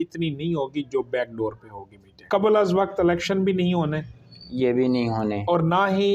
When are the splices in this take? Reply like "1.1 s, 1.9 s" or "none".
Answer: 2.2 s